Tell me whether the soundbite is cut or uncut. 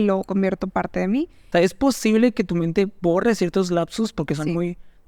cut